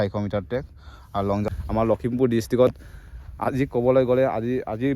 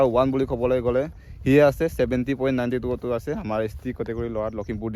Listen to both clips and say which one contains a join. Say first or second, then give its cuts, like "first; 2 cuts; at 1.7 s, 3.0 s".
first; 1 cut; at 1.5 s